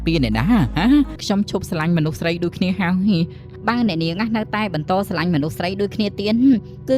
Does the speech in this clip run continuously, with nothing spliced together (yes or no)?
no